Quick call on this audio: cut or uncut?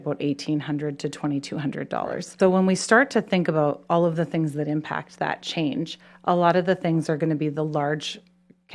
cut